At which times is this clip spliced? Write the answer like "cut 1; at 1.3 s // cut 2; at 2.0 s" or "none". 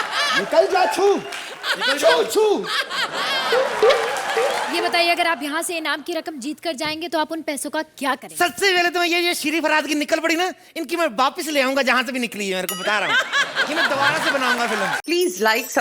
cut 1; at 4.6 s // cut 2; at 15.0 s